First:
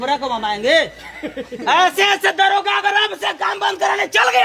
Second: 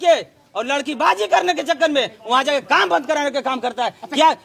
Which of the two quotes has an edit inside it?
first; 1 cut; at 1.6 s

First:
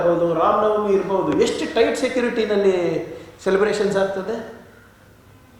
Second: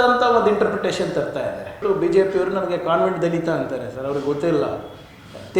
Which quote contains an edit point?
second; 1 cut; at 1.8 s

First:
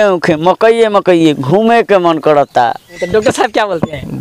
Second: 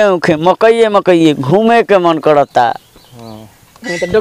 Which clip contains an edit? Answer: first; 1 cut; at 2.9 s

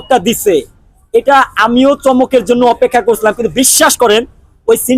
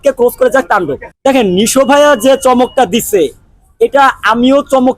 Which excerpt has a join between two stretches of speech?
second; 1 cut; at 1.0 s

